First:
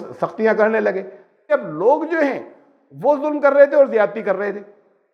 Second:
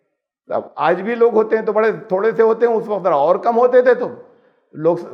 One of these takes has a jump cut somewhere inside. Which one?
first; 1 cut; at 1.4 s

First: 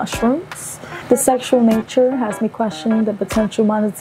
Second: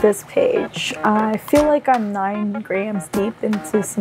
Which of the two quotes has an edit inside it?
first; 1 cut; at 0.9 s

